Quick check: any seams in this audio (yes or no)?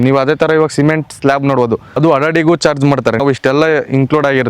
yes